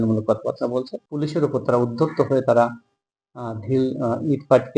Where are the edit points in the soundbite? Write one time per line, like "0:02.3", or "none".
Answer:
0:01.0